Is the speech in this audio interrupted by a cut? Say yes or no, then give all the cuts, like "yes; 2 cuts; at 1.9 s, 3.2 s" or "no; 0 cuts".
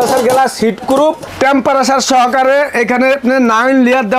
yes; 1 cut; at 1.3 s